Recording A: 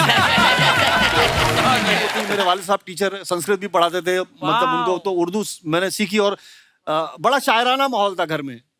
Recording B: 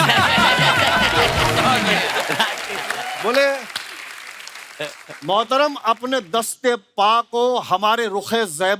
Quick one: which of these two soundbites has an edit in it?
A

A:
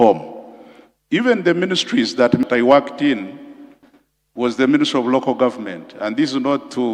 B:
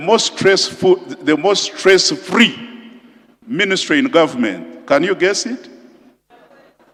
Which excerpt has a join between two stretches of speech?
A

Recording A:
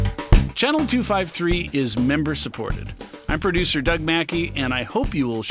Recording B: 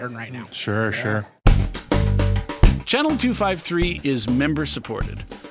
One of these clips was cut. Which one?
B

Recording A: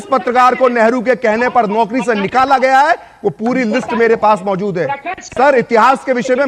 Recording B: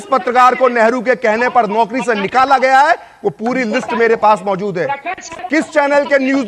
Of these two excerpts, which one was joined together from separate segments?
B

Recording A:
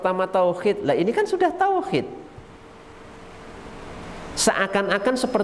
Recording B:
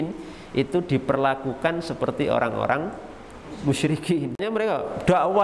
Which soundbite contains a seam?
B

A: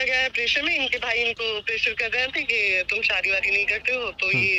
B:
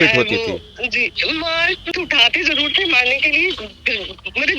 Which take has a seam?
B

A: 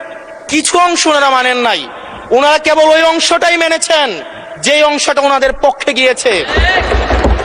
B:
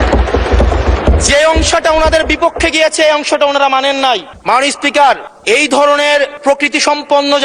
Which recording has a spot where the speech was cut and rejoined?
B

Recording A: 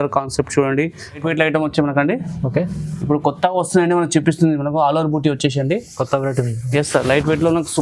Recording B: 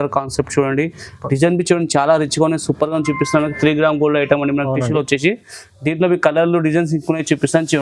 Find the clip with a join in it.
A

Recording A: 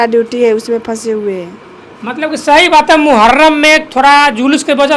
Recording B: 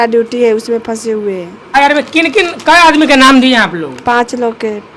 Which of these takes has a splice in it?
B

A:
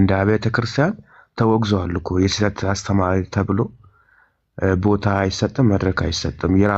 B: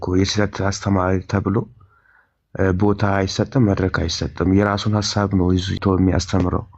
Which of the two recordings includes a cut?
B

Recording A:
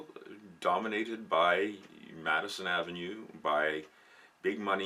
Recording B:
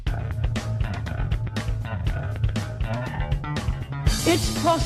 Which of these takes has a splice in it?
A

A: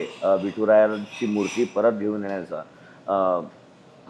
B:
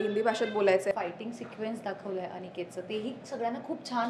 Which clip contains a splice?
B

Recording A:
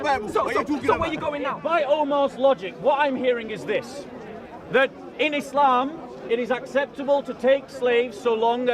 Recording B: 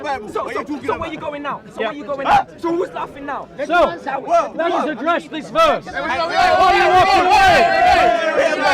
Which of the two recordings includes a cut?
A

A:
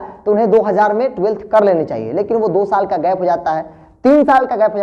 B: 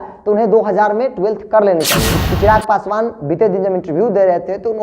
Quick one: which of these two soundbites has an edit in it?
B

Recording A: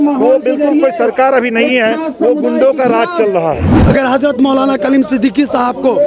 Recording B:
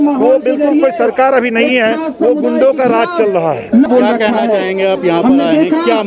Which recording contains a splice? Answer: A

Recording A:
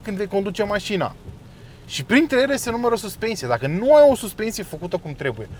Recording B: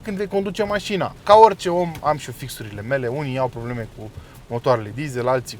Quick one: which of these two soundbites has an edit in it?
B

